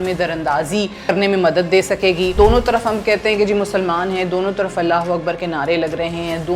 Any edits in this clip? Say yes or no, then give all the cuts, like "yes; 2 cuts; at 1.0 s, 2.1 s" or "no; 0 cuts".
yes; 2 cuts; at 1.1 s, 2.4 s